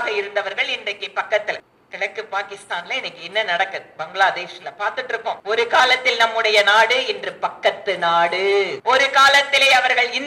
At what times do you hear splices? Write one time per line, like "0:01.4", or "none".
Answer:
0:01.8
0:05.4
0:08.8